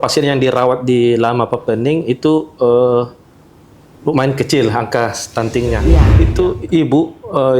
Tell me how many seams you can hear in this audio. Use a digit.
1